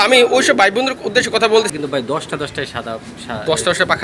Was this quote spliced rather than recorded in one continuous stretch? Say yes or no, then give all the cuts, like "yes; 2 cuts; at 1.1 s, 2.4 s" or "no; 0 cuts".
yes; 1 cut; at 1.7 s